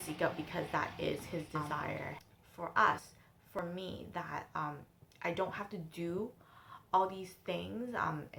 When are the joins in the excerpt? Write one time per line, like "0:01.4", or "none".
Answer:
none